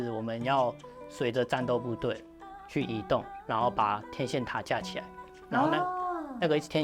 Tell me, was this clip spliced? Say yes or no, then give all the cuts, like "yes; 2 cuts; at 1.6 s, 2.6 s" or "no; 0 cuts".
no; 0 cuts